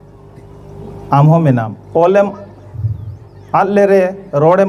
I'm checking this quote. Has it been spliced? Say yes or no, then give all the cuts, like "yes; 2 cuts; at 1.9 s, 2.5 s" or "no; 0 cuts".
yes; 1 cut; at 1.8 s